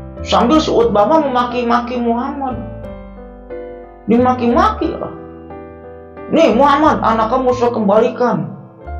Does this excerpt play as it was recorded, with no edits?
yes; 0 cuts

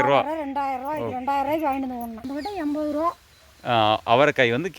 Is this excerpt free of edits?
no; 1 cut; at 2.3 s

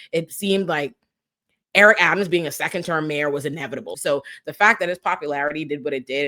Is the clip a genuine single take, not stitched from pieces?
no; 1 cut; at 4.0 s

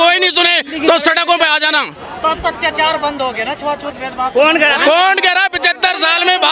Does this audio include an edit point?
no; 0 cuts

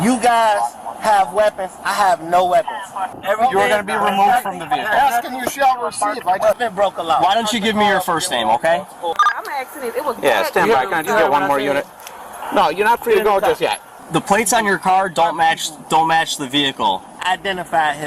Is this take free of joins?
no; 5 cuts; at 3.1 s, 6.6 s, 9.2 s, 14.0 s, 17.2 s

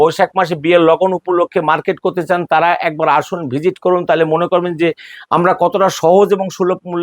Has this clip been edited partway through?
no; 0 cuts

